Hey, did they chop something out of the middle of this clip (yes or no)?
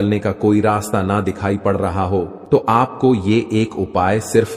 yes